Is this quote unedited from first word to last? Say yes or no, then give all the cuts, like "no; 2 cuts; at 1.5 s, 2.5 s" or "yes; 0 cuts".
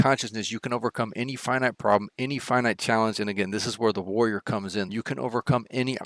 no; 1 cut; at 4.9 s